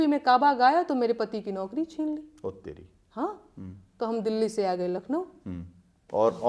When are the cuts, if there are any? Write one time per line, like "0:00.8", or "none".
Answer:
none